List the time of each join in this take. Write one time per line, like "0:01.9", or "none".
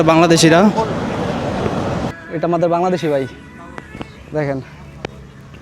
0:02.1

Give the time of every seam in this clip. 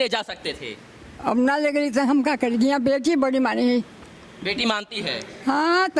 none

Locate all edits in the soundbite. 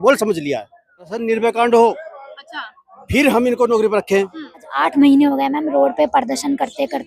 0:01.1
0:04.7

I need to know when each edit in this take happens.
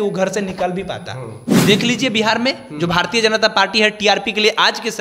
0:01.5

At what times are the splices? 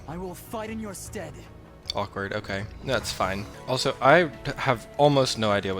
0:03.5

